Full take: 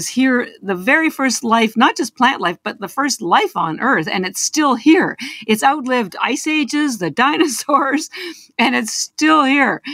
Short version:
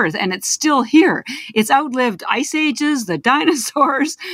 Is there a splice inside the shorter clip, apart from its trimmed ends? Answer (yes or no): no